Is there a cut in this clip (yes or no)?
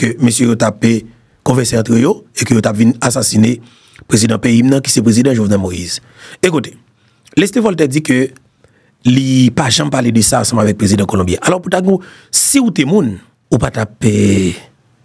yes